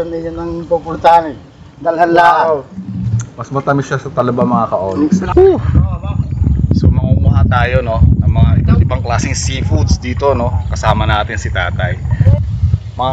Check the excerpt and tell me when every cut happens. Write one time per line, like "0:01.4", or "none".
0:05.2
0:12.2

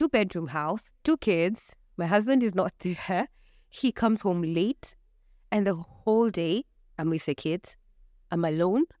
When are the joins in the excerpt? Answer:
0:00.9

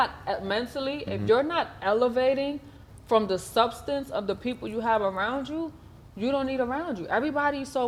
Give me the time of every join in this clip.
none

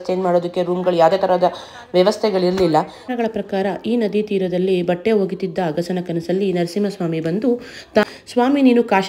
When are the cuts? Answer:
0:03.1
0:08.0

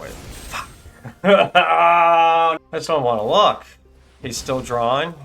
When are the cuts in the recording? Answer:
0:02.6

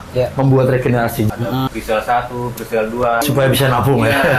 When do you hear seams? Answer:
0:01.3
0:03.2

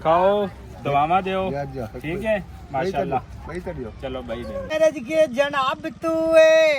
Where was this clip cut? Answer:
0:04.7

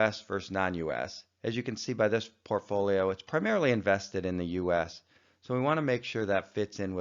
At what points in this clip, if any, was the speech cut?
0:05.8

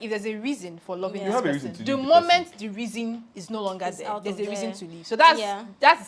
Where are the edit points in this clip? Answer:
none

